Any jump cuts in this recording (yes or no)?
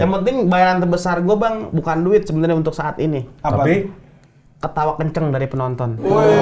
no